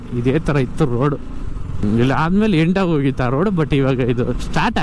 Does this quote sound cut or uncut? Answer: cut